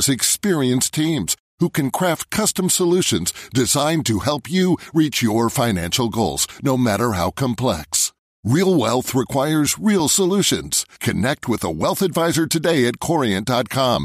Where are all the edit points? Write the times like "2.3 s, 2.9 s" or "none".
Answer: none